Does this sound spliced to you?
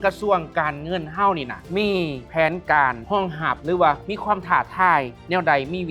no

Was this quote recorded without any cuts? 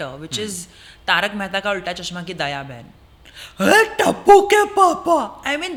yes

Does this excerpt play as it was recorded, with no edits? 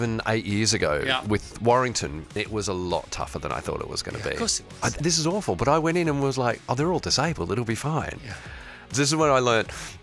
no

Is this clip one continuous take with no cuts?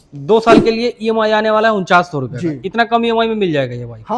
yes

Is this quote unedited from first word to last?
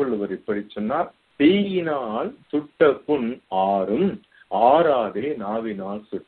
no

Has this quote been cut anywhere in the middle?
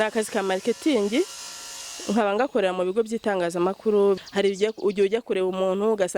yes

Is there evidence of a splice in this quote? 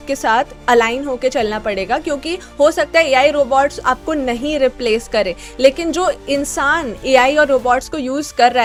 no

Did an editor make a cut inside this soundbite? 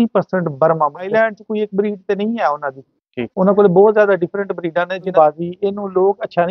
yes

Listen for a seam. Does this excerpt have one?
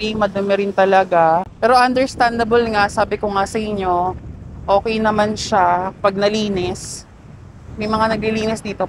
no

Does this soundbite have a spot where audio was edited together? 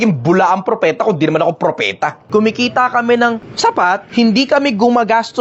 yes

